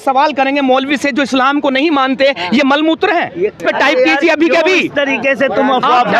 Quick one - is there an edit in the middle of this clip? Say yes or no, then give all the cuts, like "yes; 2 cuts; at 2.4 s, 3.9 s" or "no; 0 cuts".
yes; 1 cut; at 3.6 s